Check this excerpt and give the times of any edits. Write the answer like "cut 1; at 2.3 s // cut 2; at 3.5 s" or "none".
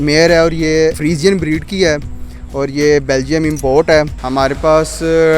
cut 1; at 1.0 s // cut 2; at 4.2 s